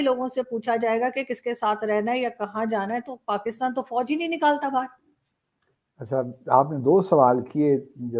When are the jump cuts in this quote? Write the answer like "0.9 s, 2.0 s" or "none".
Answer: none